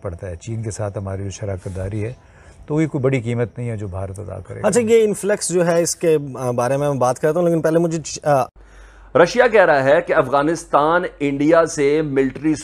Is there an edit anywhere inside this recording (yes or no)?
no